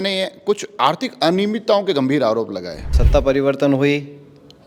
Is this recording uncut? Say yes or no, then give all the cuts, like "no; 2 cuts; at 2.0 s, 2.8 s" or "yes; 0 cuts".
no; 1 cut; at 3.0 s